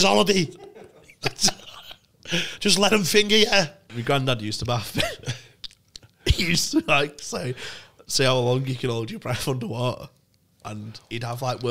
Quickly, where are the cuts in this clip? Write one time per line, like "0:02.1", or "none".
0:03.9